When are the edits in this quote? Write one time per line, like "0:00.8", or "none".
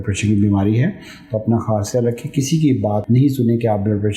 0:03.0